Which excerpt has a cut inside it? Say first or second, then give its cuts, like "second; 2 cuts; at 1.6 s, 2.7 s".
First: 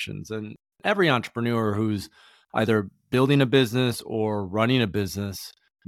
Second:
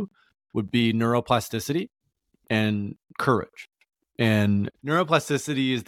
second; 1 cut; at 4.7 s